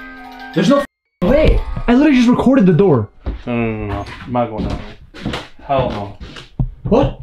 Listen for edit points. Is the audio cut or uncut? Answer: uncut